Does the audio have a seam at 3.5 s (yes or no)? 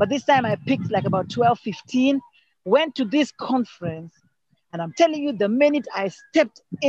no